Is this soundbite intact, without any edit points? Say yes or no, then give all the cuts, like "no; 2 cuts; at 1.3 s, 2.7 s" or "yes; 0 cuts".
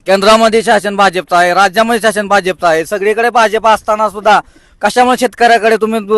yes; 0 cuts